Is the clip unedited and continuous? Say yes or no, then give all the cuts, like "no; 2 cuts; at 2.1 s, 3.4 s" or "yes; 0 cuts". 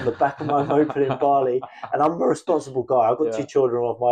yes; 0 cuts